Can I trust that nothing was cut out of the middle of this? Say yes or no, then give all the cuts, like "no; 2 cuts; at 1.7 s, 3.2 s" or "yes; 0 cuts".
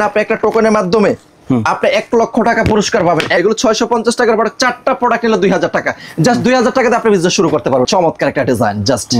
no; 2 cuts; at 3.4 s, 7.9 s